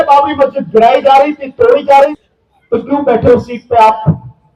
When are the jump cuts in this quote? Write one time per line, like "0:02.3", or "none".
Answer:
0:02.2